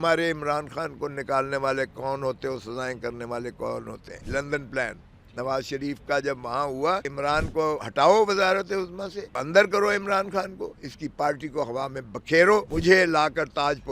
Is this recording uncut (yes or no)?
no